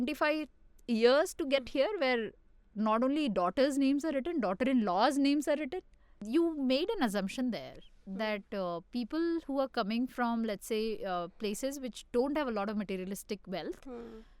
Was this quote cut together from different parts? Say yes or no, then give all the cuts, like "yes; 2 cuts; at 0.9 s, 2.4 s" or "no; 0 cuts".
yes; 1 cut; at 6.1 s